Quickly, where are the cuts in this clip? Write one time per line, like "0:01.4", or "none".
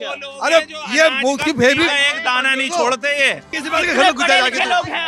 0:03.4